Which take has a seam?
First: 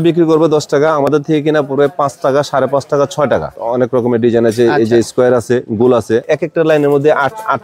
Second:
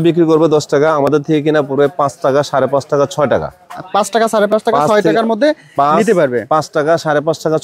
first; 2 cuts; at 3.6 s, 6.3 s

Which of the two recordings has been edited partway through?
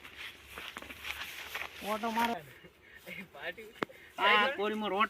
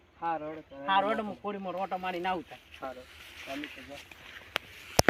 first; 1 cut; at 2.3 s

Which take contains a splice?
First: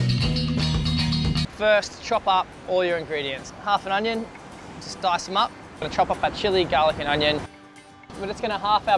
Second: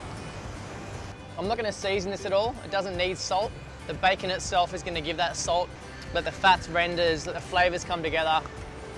second; 1 cut; at 1.5 s

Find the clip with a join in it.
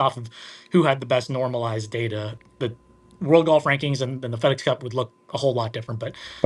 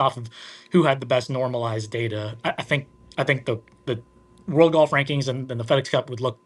first; 1 cut; at 2.4 s

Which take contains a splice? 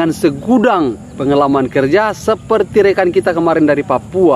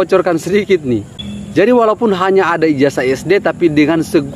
second; 1 cut; at 1.1 s

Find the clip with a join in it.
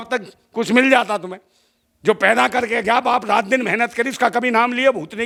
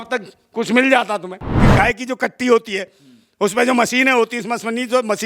second; 1 cut; at 1.6 s

